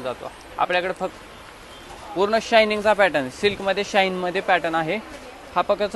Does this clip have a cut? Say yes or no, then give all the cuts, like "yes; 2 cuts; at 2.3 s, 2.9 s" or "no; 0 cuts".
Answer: yes; 1 cut; at 1.1 s